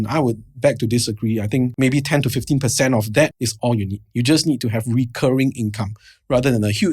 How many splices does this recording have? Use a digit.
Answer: 2